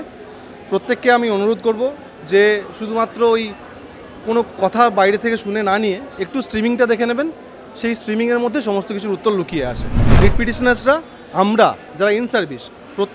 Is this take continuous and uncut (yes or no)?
no